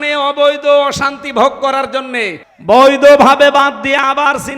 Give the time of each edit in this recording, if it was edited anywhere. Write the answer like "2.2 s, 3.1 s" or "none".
2.5 s